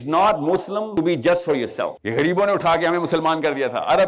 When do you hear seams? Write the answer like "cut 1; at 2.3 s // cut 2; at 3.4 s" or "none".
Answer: cut 1; at 0.9 s // cut 2; at 2.0 s